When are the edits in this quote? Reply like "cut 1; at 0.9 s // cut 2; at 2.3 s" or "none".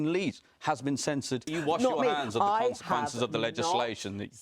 cut 1; at 1.5 s